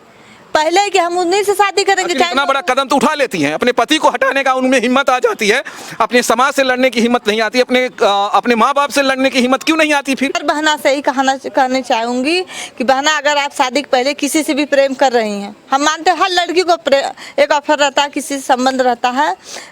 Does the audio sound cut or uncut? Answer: cut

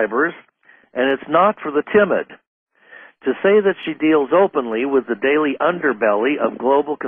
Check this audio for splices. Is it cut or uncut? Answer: cut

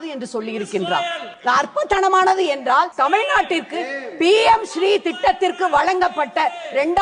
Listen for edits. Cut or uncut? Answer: cut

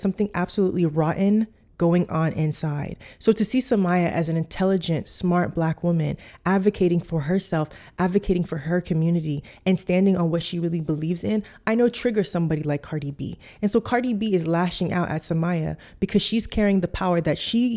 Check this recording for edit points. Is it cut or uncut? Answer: uncut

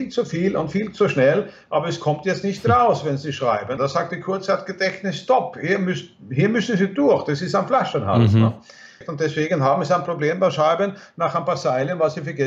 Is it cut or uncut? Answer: cut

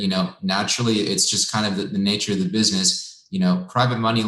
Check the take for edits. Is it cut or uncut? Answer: uncut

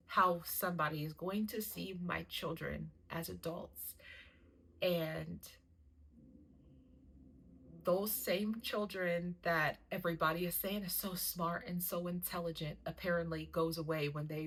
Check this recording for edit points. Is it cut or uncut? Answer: uncut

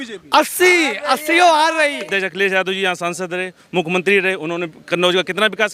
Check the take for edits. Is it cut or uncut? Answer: cut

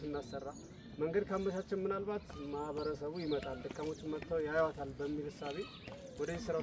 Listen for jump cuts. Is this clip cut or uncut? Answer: uncut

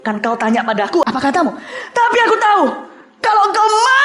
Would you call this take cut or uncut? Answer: cut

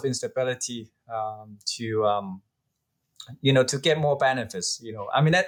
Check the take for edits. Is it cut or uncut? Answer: uncut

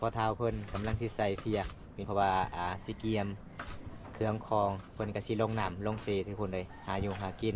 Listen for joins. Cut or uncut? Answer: cut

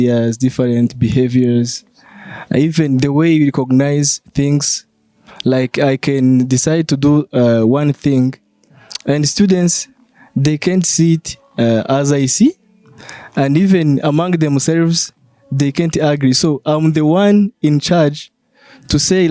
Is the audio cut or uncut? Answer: uncut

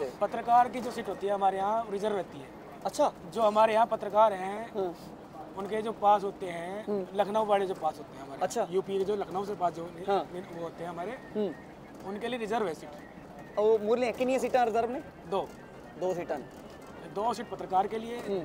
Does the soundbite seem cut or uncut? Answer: uncut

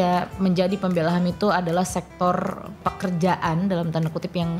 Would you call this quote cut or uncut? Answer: cut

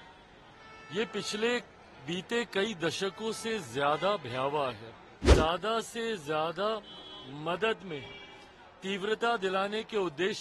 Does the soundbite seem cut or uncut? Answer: cut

